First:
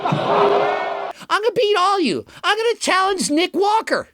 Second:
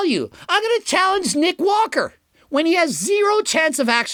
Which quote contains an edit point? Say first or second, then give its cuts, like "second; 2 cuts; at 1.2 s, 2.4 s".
first; 1 cut; at 1.0 s